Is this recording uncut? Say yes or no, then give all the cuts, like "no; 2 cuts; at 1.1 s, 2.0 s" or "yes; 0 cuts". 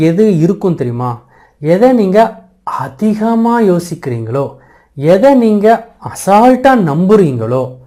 yes; 0 cuts